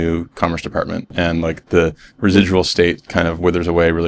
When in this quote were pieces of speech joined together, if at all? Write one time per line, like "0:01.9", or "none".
0:01.1